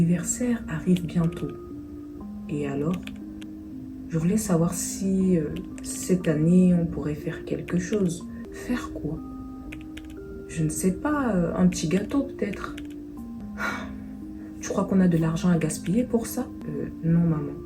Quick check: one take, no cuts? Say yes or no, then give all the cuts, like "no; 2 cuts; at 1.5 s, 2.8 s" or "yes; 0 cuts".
no; 3 cuts; at 8.5 s, 13.4 s, 16.6 s